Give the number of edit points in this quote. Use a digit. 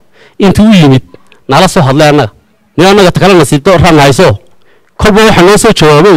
1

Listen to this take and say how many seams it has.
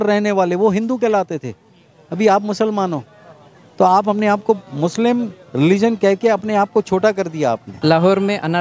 1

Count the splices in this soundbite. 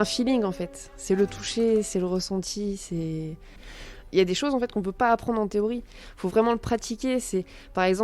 1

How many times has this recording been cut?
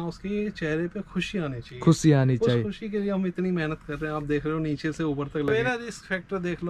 1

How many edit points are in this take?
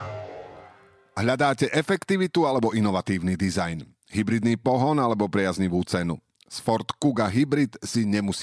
1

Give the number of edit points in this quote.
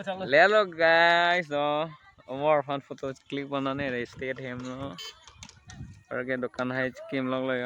0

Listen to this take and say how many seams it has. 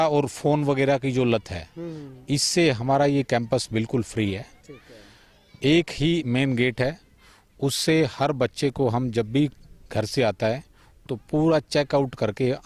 0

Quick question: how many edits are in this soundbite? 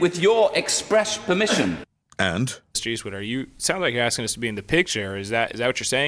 1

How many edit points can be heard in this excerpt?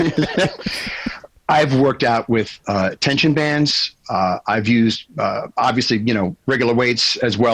1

